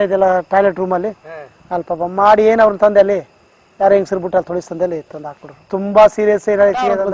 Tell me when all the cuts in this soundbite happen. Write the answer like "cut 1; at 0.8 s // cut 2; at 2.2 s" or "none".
none